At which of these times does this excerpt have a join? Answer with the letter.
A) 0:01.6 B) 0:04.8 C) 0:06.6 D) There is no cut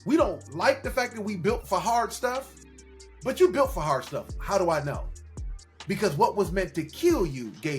A